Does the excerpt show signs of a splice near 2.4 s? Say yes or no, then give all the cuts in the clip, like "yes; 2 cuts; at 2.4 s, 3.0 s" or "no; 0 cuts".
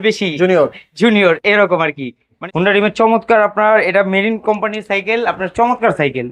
yes; 1 cut; at 2.4 s